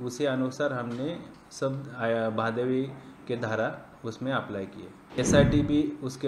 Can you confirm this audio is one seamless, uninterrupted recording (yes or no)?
no